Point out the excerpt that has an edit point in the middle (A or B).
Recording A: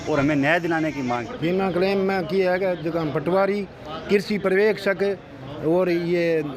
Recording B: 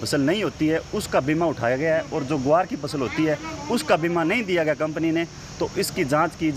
A